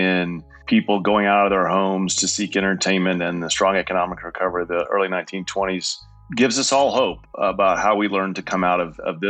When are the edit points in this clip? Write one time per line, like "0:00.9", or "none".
0:06.2
0:07.2